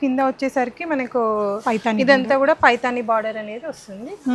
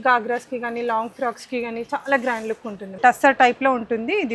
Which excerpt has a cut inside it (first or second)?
second